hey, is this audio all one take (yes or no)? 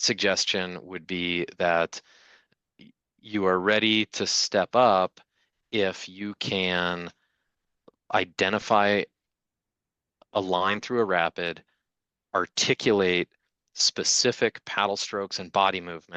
yes